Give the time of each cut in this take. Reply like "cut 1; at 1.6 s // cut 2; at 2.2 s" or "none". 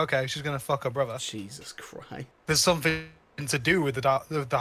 cut 1; at 1.2 s // cut 2; at 2.3 s